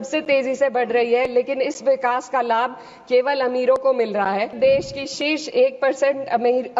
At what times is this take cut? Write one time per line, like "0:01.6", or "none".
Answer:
0:04.5